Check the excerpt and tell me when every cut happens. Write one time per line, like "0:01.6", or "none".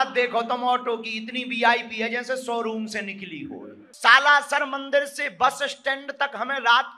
0:03.8